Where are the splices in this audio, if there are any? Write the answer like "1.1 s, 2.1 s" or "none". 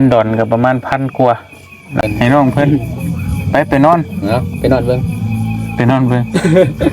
2.0 s